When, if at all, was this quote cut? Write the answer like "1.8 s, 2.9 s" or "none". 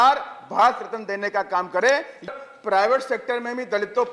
2.3 s